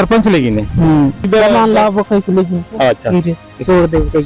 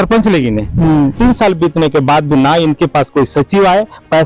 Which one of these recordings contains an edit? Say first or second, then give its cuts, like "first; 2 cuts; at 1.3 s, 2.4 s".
second; 1 cut; at 1.1 s